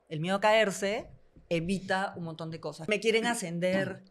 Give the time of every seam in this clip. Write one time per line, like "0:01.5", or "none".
0:02.9